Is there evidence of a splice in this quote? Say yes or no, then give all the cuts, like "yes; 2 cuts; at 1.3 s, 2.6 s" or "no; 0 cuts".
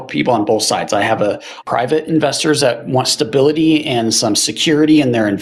no; 0 cuts